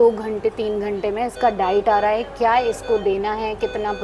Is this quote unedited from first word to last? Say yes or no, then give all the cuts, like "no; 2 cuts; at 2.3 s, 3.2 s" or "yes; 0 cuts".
yes; 0 cuts